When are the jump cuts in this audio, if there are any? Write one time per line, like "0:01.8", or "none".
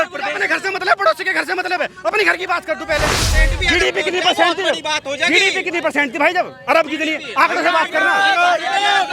0:03.3